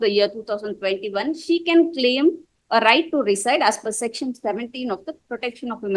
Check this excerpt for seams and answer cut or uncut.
uncut